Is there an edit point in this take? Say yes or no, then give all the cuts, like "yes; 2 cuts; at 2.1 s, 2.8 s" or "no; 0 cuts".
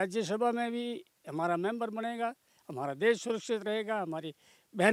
no; 0 cuts